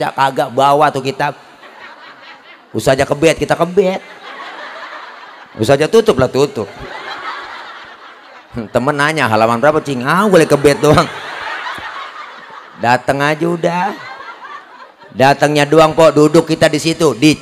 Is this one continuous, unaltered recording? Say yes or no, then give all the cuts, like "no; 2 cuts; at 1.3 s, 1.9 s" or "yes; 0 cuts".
yes; 0 cuts